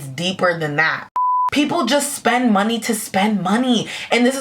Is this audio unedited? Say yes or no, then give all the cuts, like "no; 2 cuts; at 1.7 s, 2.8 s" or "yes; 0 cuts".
no; 1 cut; at 1.4 s